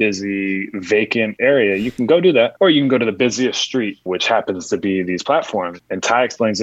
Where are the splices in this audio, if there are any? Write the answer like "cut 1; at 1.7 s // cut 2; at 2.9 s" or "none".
cut 1; at 1.3 s // cut 2; at 2.5 s // cut 3; at 4.0 s // cut 4; at 5.7 s